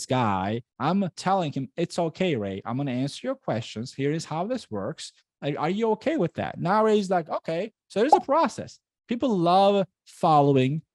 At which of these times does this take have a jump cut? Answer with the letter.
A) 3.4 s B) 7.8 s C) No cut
C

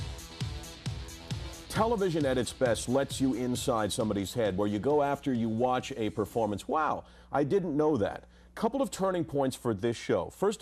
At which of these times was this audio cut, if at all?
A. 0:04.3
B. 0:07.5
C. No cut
B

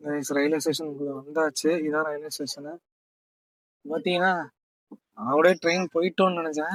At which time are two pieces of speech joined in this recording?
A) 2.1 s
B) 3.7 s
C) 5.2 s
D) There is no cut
D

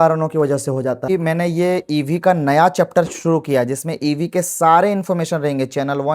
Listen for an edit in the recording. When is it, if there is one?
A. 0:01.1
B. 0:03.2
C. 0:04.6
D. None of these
A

